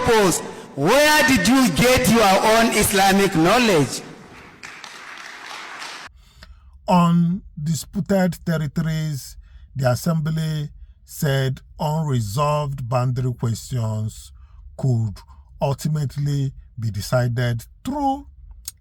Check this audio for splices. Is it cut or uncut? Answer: cut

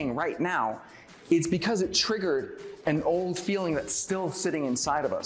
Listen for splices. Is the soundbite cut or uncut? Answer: uncut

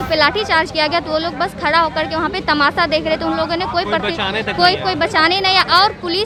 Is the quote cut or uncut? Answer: uncut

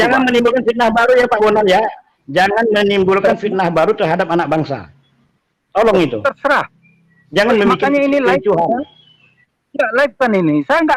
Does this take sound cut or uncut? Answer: uncut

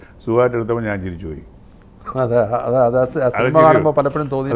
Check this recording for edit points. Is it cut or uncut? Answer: uncut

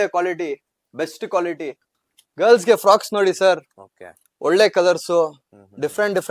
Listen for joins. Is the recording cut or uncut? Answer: cut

